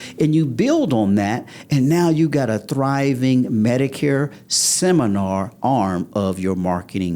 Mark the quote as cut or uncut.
uncut